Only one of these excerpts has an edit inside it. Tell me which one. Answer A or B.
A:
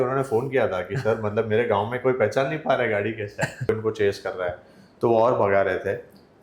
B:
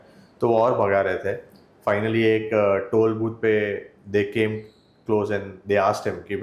A